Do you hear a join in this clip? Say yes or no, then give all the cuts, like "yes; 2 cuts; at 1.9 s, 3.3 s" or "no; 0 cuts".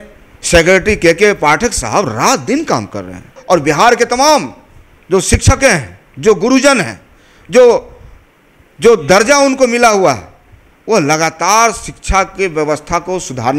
yes; 1 cut; at 3.4 s